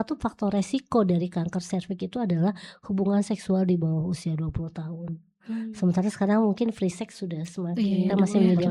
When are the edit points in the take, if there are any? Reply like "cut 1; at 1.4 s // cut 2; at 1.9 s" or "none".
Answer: none